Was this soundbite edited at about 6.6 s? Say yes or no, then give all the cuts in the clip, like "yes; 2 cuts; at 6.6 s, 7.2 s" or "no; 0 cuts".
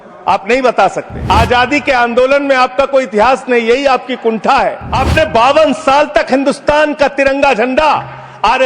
no; 2 cuts; at 1.1 s, 4.9 s